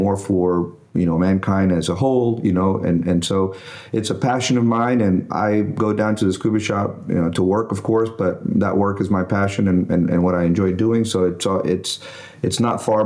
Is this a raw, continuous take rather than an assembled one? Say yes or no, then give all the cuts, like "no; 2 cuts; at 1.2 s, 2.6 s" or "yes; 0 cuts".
yes; 0 cuts